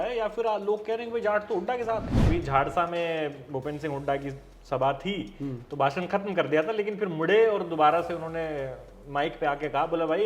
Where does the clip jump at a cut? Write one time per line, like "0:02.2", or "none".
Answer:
0:02.3